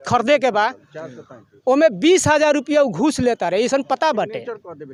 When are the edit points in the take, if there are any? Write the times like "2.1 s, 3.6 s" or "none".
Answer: none

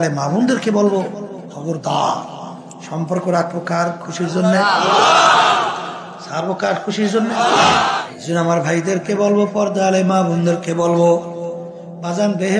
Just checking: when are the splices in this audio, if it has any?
8.0 s

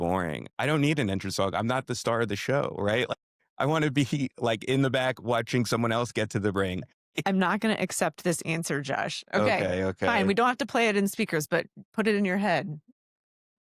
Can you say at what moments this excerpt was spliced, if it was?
7.1 s

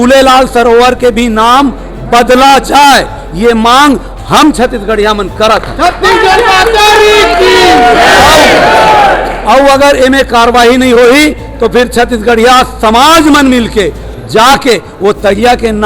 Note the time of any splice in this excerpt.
none

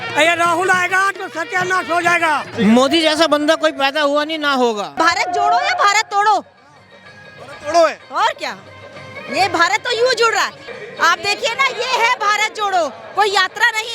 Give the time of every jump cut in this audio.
2.5 s, 4.9 s, 10.6 s

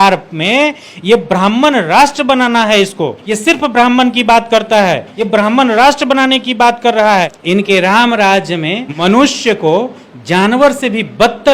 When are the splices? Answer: 3.2 s, 5.1 s, 7.1 s, 8.9 s

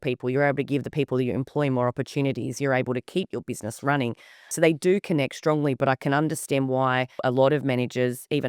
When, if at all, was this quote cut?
4.5 s, 7.2 s

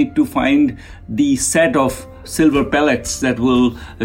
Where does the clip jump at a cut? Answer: 2.2 s

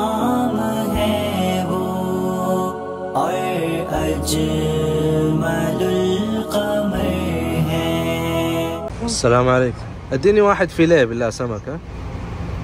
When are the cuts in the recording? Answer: 8.9 s

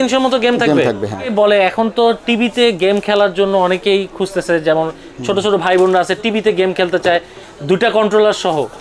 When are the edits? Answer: 1.3 s

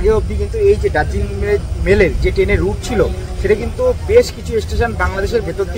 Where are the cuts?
none

